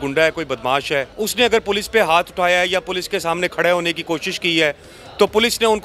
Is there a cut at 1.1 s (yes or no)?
yes